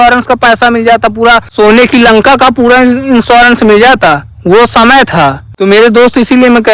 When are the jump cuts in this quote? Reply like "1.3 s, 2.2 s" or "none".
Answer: 1.5 s, 5.4 s